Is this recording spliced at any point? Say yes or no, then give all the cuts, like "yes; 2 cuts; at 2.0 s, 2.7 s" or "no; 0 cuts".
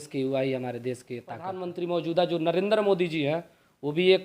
yes; 1 cut; at 1.6 s